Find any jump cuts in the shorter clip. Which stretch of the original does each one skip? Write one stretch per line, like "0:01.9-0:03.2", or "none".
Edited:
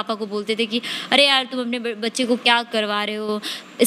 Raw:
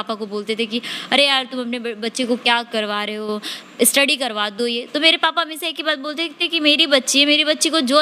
none